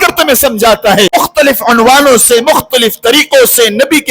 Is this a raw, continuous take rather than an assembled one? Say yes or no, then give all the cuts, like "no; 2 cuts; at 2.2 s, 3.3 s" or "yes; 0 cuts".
no; 1 cut; at 1.1 s